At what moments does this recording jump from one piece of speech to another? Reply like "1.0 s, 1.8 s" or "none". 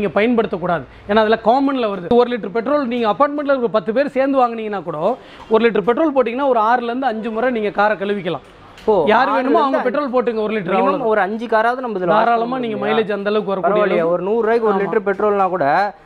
2.1 s